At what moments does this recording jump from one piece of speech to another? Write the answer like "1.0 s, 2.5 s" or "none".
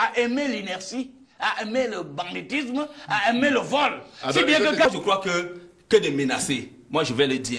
4.9 s

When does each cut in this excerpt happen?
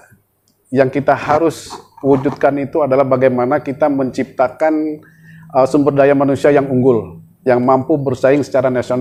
none

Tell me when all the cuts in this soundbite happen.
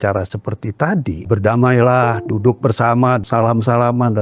1.3 s, 3.2 s

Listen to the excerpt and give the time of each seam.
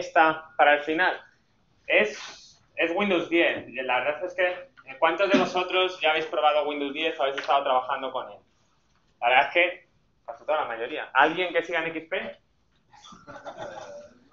9.2 s

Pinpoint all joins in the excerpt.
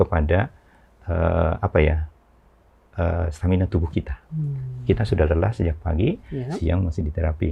none

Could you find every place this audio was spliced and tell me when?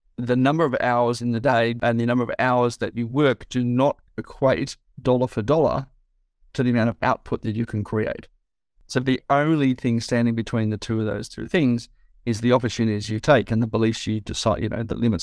1.8 s, 8.7 s

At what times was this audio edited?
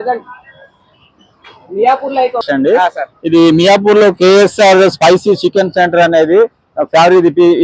2.4 s

